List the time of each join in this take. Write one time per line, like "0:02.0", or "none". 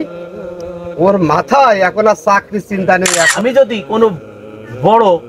0:03.0

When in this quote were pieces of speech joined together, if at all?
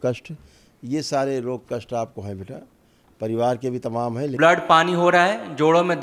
0:04.3

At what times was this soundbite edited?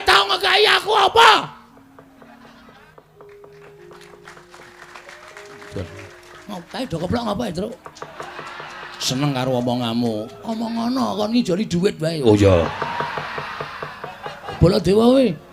0:02.9
0:14.6

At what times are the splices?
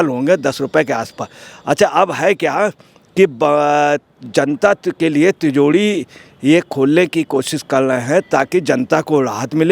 none

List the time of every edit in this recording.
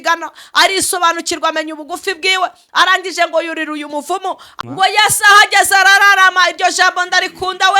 0:04.5

